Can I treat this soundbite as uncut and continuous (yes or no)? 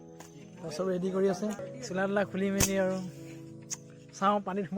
no